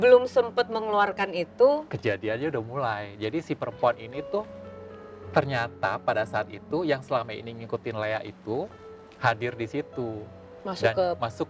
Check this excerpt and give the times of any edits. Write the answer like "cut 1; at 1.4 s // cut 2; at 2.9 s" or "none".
none